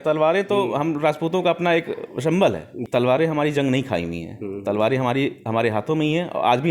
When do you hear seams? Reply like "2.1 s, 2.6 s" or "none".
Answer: 2.8 s